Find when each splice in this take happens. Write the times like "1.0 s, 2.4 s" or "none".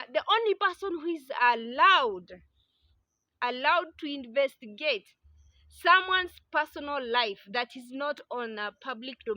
none